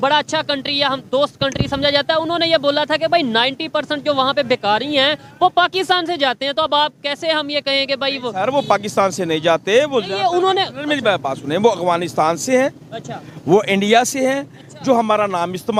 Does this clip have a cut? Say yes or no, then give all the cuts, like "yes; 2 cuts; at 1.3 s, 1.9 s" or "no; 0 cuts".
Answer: no; 0 cuts